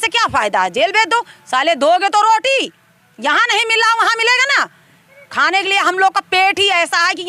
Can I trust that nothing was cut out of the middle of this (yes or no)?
yes